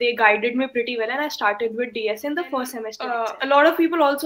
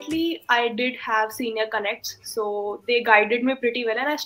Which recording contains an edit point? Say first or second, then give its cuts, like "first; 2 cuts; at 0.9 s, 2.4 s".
first; 1 cut; at 3.0 s